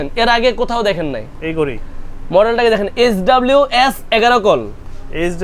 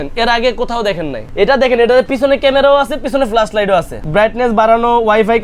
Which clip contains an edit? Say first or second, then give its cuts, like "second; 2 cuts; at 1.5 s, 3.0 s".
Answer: second; 2 cuts; at 1.2 s, 4.0 s